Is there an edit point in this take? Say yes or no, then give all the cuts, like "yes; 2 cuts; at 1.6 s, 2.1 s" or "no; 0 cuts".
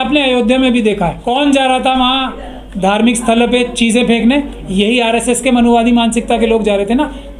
yes; 1 cut; at 1.2 s